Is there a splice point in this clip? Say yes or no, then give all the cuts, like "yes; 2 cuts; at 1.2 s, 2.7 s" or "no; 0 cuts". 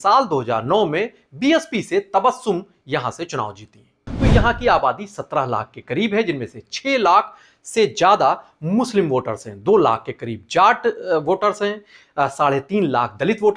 yes; 1 cut; at 4.1 s